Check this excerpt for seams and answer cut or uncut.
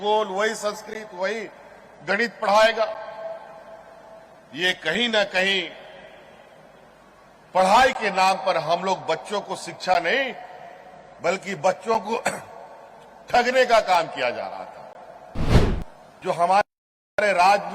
cut